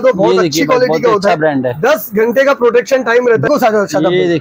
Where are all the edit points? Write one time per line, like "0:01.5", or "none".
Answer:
0:03.5